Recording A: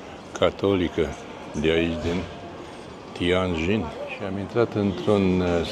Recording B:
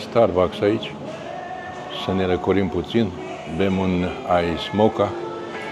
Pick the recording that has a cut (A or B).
A